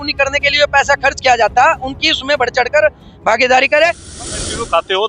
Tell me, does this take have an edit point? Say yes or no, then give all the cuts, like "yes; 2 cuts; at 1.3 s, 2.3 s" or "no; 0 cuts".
yes; 1 cut; at 4.1 s